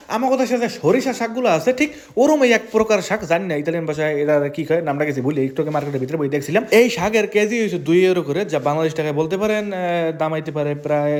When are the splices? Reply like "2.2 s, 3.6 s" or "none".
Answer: none